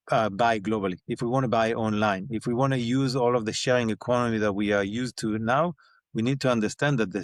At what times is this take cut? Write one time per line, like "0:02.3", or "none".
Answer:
none

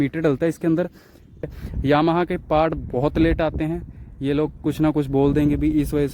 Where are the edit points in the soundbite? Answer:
0:01.3

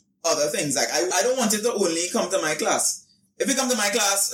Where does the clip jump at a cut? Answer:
0:01.1

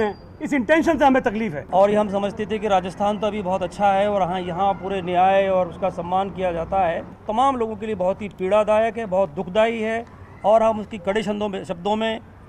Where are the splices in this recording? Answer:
0:01.6
0:07.2

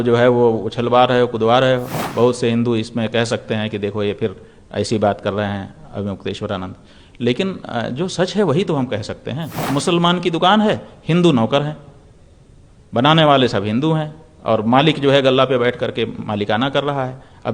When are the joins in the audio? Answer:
0:02.0
0:09.6

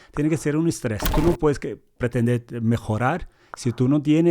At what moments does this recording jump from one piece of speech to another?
0:01.1

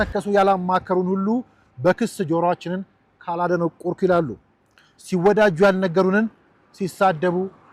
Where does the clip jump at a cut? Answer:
none

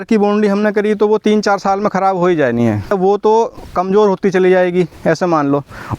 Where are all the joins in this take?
0:02.9

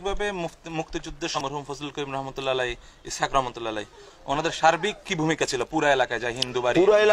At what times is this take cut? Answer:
0:01.4

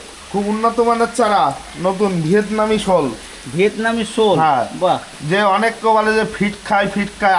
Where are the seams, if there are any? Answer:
none

